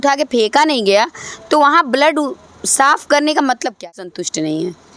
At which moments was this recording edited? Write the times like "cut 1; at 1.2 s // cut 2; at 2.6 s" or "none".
cut 1; at 3.8 s

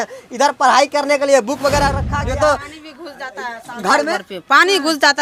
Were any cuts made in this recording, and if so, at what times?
cut 1; at 2.1 s

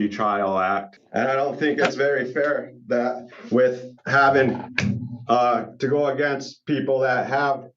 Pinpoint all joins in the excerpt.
cut 1; at 1.0 s

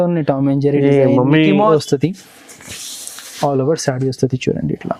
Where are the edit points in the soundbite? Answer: cut 1; at 1.7 s

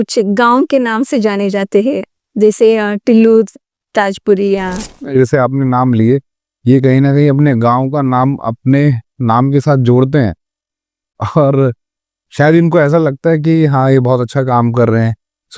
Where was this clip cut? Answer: cut 1; at 5.1 s

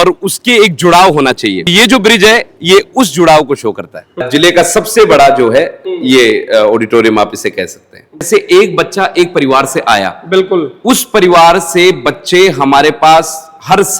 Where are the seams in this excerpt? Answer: cut 1; at 1.7 s // cut 2; at 4.2 s // cut 3; at 8.3 s

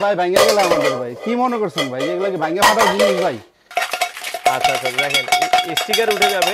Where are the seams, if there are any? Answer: cut 1; at 3.7 s

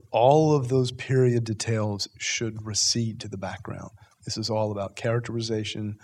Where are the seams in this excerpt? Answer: none

